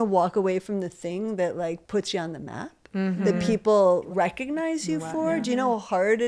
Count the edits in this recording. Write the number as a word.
two